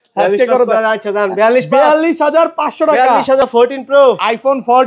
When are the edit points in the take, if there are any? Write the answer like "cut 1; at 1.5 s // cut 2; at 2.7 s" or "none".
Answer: cut 1; at 3.4 s